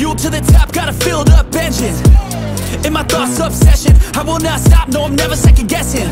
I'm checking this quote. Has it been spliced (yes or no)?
no